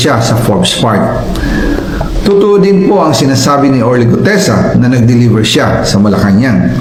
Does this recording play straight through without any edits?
yes; 0 cuts

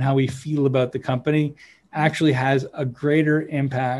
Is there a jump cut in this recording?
no; 0 cuts

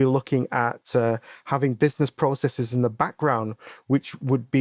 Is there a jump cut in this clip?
no; 0 cuts

